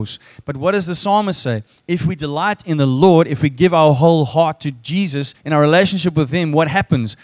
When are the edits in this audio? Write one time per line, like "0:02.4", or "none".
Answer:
0:05.3